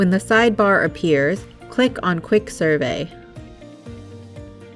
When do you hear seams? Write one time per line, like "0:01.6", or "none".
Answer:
0:03.5